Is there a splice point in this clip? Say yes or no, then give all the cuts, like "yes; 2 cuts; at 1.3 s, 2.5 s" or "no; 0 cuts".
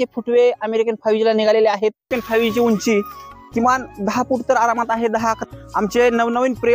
yes; 2 cuts; at 2.1 s, 5.5 s